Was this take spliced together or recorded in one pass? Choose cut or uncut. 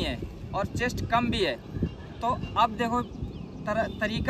uncut